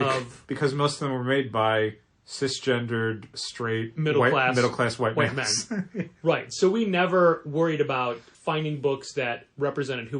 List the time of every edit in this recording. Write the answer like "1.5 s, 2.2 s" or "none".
3.4 s, 8.3 s